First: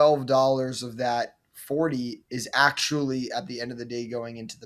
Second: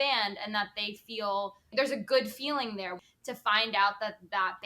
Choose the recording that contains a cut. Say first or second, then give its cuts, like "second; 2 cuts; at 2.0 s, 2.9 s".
second; 2 cuts; at 1.7 s, 3.0 s